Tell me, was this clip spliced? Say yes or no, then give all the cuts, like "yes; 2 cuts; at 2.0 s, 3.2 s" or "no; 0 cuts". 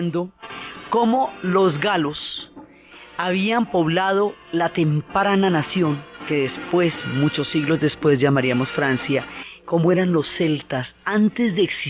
no; 0 cuts